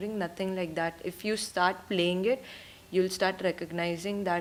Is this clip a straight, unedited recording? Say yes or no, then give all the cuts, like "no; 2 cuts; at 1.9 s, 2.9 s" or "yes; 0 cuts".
yes; 0 cuts